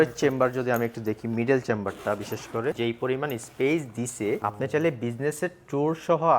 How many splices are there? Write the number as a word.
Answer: two